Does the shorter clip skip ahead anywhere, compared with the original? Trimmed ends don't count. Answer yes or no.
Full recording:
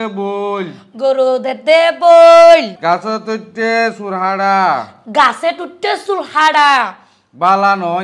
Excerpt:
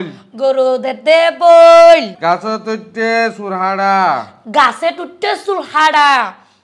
no